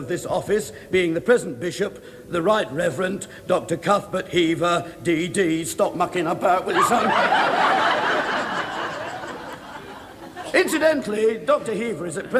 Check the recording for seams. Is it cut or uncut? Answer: uncut